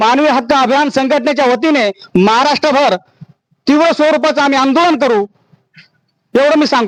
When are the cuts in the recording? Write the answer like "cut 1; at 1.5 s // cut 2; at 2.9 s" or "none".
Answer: none